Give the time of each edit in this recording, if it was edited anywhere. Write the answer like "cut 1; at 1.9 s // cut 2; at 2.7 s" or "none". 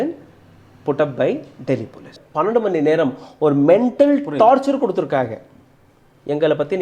cut 1; at 2.2 s